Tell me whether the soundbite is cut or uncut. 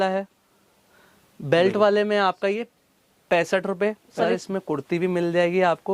cut